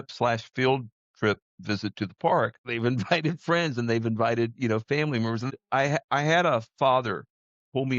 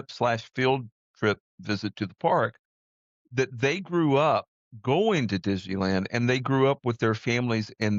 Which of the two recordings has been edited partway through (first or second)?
first